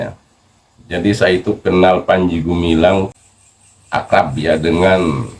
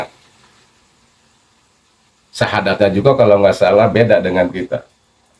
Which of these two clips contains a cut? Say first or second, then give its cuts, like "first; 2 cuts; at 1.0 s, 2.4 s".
first; 1 cut; at 3.2 s